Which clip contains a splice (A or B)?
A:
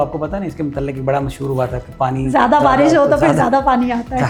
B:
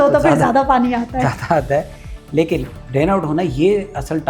B